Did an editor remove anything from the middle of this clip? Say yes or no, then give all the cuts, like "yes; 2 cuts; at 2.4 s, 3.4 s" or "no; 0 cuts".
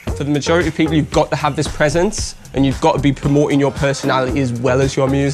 no; 0 cuts